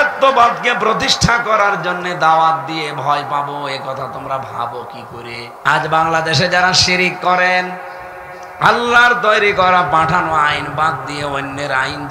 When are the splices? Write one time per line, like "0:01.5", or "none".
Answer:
0:05.6